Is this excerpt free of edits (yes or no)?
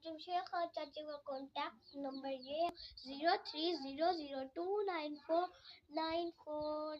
no